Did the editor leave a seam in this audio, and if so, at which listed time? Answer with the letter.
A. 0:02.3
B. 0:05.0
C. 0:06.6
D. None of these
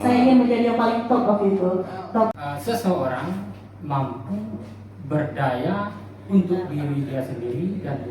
A